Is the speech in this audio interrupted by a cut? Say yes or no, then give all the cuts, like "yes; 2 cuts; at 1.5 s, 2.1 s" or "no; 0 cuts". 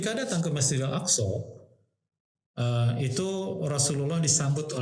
no; 0 cuts